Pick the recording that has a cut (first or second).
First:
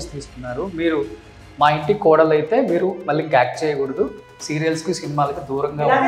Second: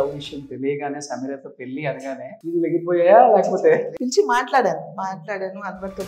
second